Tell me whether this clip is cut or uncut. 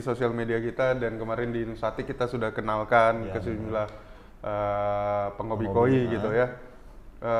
uncut